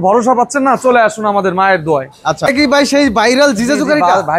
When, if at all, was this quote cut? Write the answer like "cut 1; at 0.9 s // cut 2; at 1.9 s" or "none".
cut 1; at 2.5 s